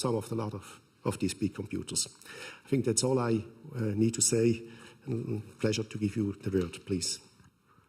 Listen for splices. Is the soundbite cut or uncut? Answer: cut